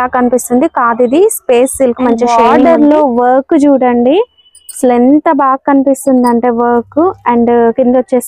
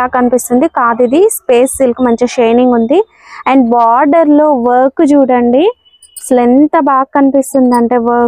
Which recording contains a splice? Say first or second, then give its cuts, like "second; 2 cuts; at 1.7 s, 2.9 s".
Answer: first; 1 cut; at 2.3 s